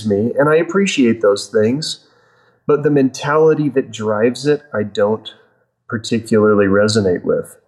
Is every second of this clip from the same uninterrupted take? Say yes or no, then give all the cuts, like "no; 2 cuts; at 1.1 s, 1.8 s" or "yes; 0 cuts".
yes; 0 cuts